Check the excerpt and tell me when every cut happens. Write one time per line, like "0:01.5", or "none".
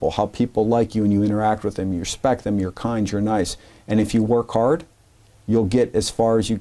none